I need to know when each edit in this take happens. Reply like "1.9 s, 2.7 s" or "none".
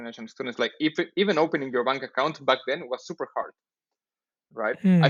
none

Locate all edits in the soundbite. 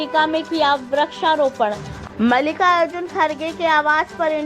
1.9 s

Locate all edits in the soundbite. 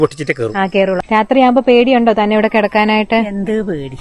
1.0 s

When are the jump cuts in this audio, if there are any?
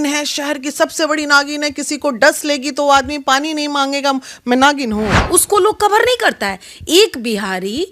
5.2 s

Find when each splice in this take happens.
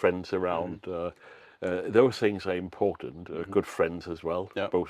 none

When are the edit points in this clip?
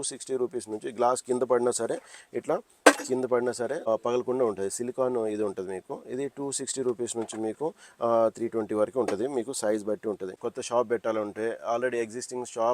3.8 s, 10.5 s

